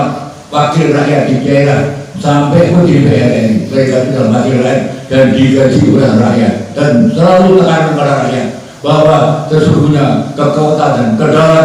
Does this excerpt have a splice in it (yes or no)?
no